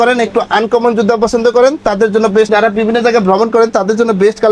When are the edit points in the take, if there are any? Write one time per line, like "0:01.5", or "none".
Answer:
0:02.5